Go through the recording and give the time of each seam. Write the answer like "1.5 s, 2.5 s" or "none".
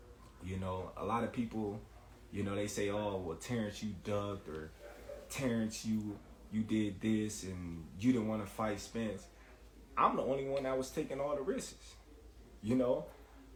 none